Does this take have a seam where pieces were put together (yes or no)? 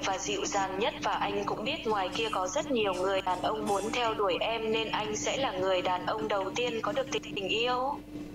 yes